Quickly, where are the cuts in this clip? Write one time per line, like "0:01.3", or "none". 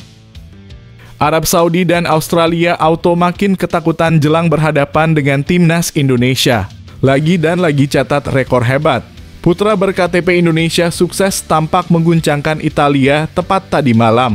0:01.1